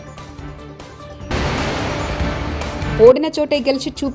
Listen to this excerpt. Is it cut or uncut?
cut